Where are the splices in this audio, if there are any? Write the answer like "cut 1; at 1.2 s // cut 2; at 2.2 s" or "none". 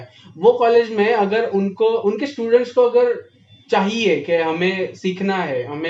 none